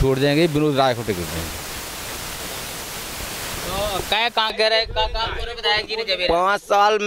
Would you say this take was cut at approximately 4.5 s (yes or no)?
yes